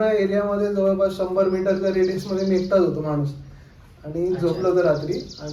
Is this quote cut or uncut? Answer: uncut